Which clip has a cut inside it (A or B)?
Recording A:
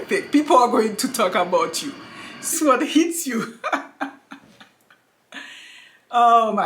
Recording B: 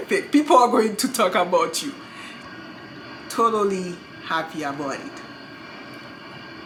A